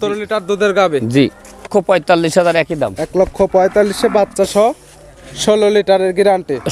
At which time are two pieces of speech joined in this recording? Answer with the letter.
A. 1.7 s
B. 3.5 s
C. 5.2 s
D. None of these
A